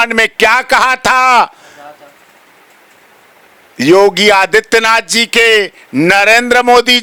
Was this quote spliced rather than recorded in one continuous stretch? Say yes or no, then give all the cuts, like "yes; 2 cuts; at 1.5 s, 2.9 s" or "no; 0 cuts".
no; 0 cuts